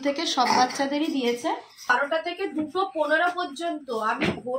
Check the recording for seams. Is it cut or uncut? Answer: cut